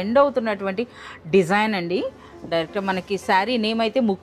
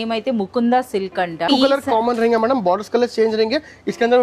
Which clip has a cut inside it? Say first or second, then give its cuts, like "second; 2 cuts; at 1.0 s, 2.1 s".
second; 1 cut; at 1.5 s